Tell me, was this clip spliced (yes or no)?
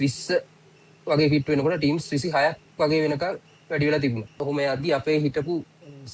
yes